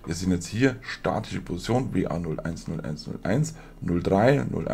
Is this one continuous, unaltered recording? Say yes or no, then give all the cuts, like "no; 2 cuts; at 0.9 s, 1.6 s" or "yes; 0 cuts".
yes; 0 cuts